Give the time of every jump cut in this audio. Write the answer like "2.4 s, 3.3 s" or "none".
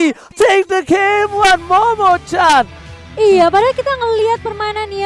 none